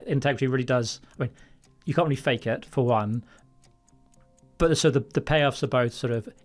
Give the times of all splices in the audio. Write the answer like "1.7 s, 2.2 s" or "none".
none